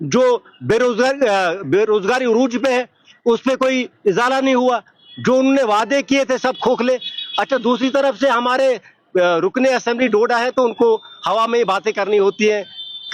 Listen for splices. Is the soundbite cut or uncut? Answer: uncut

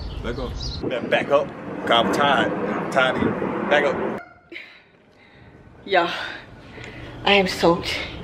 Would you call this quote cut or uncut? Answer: cut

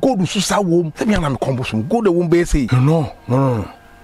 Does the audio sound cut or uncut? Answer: cut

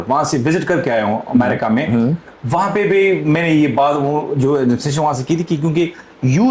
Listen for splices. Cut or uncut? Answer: uncut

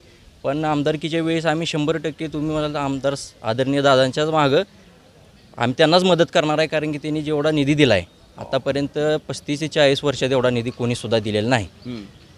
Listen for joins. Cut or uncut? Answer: uncut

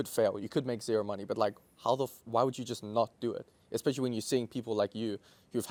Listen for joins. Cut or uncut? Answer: uncut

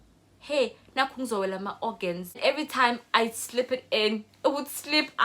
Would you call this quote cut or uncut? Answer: cut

